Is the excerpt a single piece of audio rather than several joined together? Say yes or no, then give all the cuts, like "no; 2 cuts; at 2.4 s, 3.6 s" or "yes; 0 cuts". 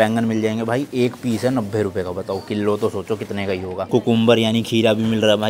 yes; 0 cuts